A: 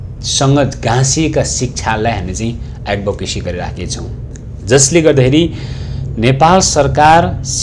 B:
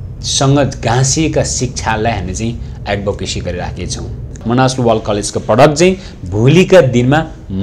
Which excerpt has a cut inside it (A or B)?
B